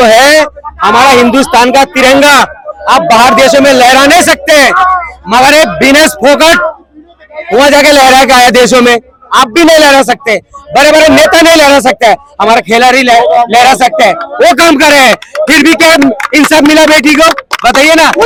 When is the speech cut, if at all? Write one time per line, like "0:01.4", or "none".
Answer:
none